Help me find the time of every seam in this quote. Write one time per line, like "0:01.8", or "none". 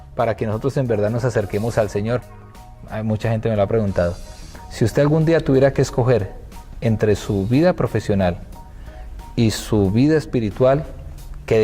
0:02.3